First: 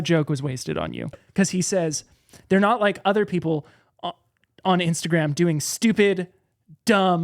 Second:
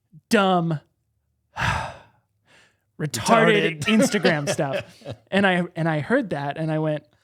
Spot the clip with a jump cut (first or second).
first